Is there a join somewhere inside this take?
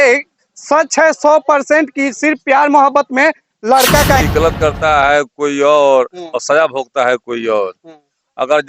yes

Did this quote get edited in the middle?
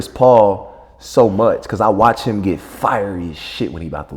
no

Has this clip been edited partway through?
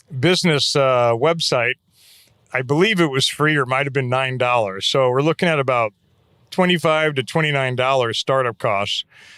no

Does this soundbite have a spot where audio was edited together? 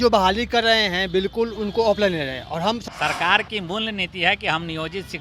yes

